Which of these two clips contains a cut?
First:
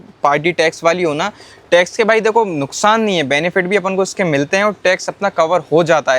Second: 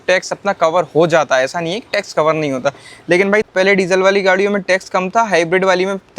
second; 1 cut; at 3.5 s

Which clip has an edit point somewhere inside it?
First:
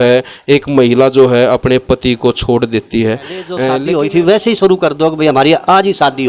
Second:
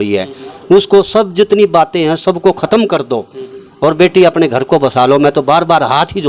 first; 1 cut; at 3.7 s

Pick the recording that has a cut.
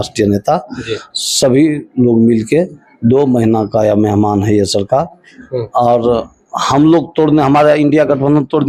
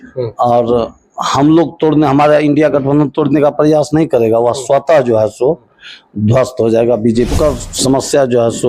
second; 1 cut; at 7.3 s

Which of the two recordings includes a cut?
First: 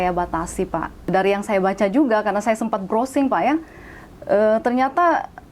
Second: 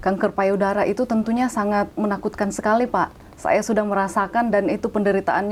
first; 1 cut; at 1.1 s

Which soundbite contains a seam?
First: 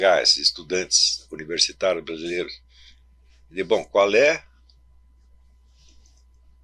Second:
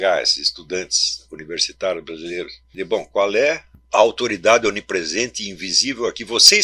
second; 2 cuts; at 2.6 s, 3.7 s

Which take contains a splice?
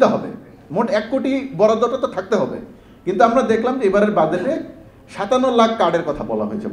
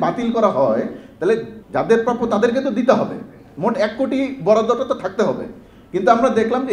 second; 1 cut; at 1.6 s

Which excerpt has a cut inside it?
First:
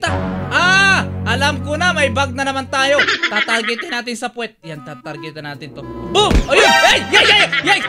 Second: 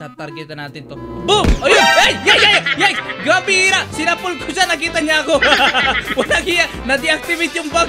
first; 1 cut; at 3.0 s

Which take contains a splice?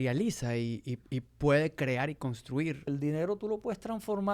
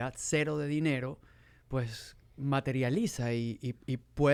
first; 1 cut; at 2.9 s

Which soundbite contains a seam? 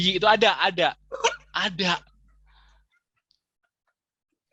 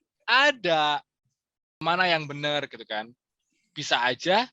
second; 1 cut; at 1.8 s

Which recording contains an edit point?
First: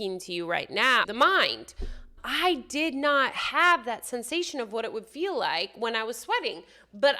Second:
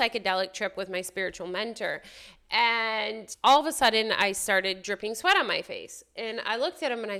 first; 1 cut; at 1.0 s

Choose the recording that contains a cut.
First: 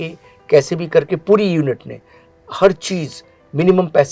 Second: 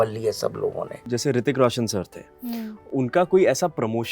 second; 1 cut; at 1.1 s

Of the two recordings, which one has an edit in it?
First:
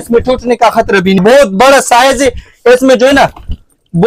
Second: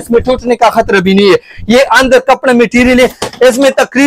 first; 1 cut; at 1.2 s

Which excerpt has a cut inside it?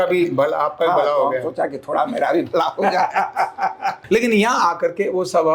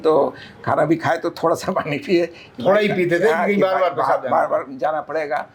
first; 1 cut; at 4.0 s

